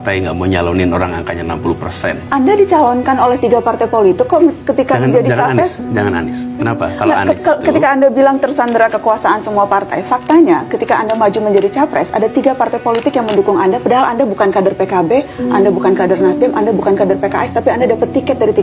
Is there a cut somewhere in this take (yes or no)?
no